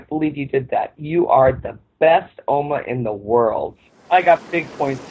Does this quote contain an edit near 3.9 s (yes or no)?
yes